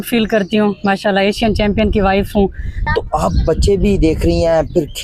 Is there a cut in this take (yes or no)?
yes